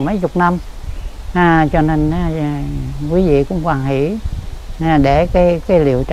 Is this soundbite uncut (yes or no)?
yes